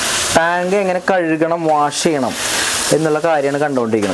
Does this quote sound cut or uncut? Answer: uncut